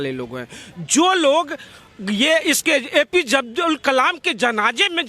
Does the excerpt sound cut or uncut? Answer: uncut